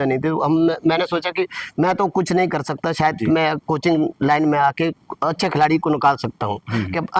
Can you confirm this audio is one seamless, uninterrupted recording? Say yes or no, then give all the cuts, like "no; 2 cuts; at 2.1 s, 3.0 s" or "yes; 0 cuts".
yes; 0 cuts